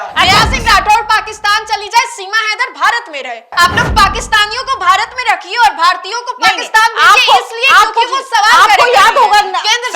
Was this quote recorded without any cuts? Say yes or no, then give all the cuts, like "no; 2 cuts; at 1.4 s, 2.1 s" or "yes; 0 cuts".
no; 1 cut; at 3.5 s